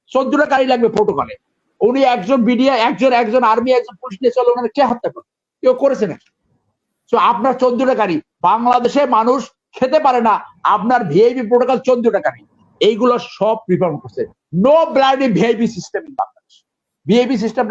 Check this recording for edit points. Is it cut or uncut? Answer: uncut